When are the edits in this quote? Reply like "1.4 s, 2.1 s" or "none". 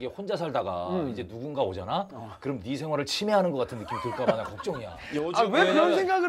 none